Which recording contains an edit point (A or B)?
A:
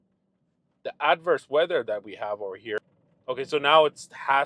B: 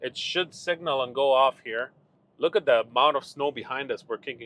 A